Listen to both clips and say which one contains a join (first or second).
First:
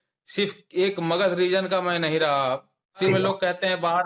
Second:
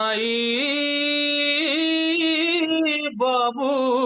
first